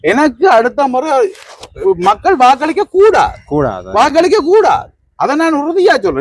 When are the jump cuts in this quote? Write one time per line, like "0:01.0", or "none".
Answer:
none